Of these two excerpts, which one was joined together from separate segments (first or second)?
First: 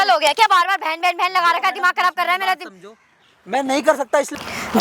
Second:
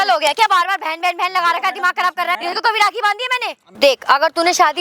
second